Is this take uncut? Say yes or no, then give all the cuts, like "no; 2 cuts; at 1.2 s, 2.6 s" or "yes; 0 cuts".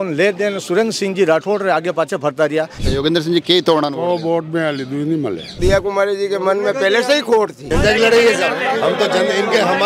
no; 3 cuts; at 2.8 s, 5.5 s, 7.6 s